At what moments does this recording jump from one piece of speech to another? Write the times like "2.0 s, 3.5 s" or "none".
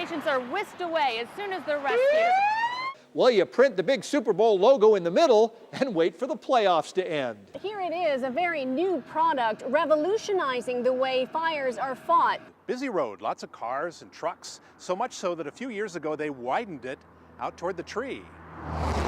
2.9 s, 7.6 s, 12.5 s